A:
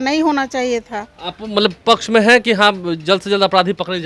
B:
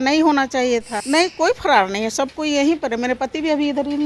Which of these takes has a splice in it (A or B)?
B